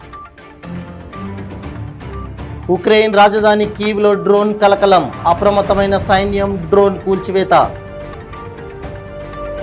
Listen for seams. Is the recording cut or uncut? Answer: cut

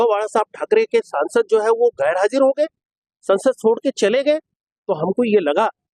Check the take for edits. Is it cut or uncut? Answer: uncut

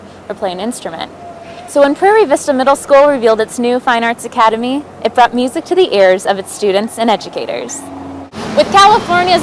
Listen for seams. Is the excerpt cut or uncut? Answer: cut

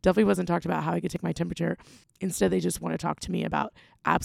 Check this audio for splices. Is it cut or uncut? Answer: cut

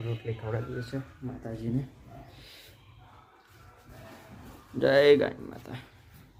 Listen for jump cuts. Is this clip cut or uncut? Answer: uncut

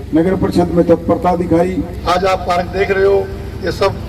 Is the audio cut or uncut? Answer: cut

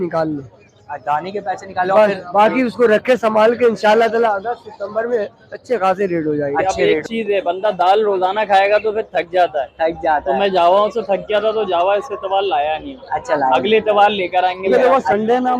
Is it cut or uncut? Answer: cut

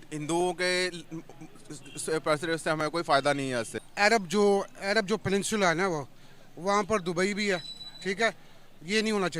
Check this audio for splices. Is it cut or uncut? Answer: cut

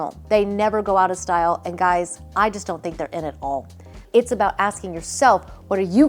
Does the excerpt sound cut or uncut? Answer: cut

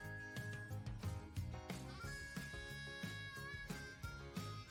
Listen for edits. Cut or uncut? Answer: uncut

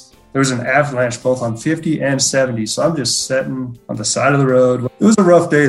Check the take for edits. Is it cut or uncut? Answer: cut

